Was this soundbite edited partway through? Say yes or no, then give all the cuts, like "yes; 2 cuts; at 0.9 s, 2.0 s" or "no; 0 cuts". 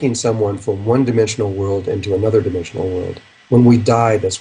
yes; 1 cut; at 2.7 s